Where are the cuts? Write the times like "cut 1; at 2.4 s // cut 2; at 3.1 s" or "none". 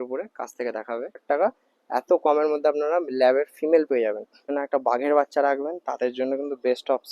cut 1; at 1.2 s // cut 2; at 4.5 s